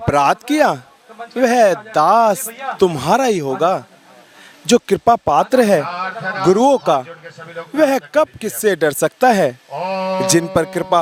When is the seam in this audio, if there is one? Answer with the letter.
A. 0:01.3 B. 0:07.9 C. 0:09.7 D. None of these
D